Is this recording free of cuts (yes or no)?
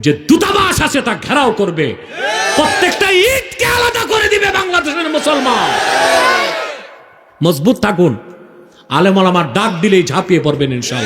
yes